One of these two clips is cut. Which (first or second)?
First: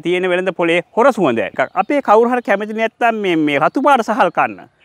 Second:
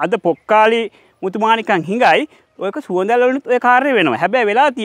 first